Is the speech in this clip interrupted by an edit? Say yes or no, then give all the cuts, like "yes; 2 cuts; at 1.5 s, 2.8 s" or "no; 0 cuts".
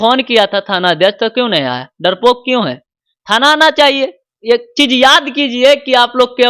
yes; 1 cut; at 4.3 s